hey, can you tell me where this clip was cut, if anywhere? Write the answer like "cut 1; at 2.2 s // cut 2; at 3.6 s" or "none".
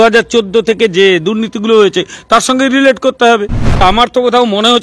cut 1; at 3.8 s

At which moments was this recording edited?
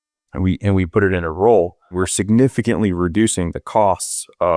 cut 1; at 1.9 s

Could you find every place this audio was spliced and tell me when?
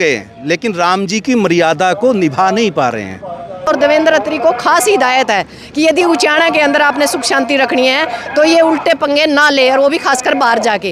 cut 1; at 3.7 s

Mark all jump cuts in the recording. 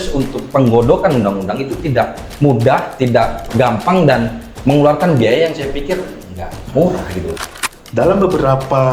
cut 1; at 7.3 s

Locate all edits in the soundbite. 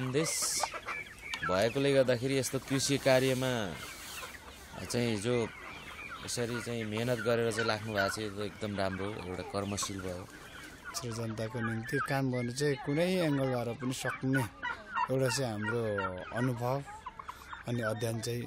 cut 1; at 11.0 s

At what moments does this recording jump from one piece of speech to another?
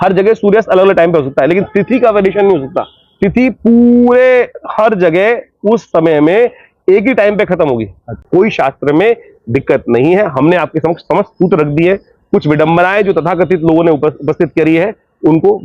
cut 1; at 8.2 s

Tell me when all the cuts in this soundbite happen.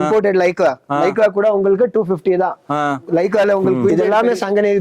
cut 1; at 3.9 s

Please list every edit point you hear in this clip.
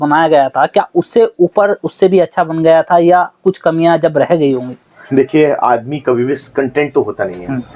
none

